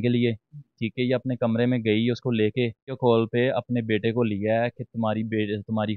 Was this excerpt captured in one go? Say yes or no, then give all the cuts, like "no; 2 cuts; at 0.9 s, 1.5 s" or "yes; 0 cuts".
no; 1 cut; at 3.0 s